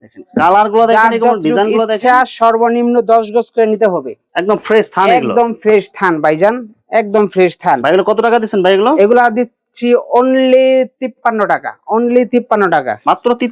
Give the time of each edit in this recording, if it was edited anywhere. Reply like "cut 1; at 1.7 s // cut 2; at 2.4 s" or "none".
none

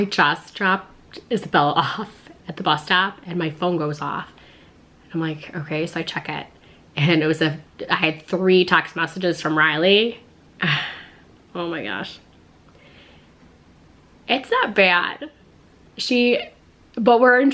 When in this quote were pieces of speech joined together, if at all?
none

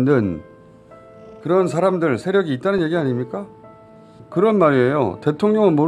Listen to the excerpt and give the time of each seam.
cut 1; at 4.2 s

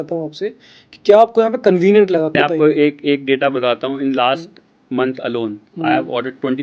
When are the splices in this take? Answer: cut 1; at 2.4 s

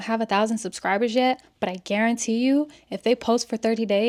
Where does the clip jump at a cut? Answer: none

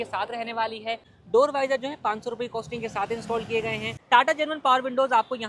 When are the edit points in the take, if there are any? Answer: cut 1; at 1.1 s // cut 2; at 3.9 s

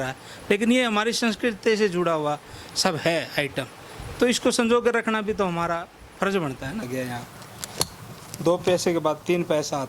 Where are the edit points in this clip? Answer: cut 1; at 6.9 s

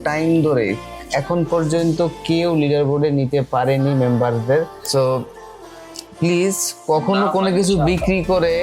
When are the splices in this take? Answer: cut 1; at 4.8 s

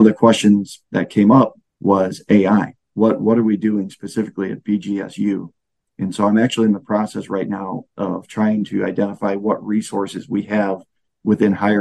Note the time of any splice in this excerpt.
cut 1; at 1.7 s

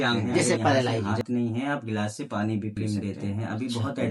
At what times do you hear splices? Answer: cut 1; at 1.1 s // cut 2; at 2.8 s

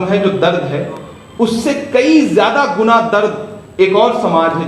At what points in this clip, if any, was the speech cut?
none

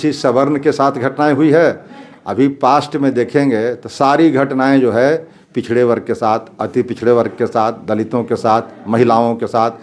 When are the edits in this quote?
none

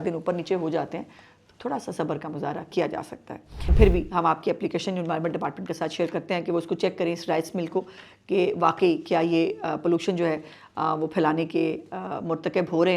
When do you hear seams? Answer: cut 1; at 3.7 s

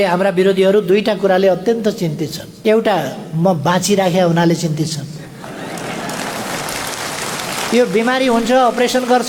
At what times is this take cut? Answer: none

